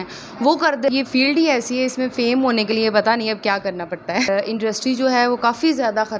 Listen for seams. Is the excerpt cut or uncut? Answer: cut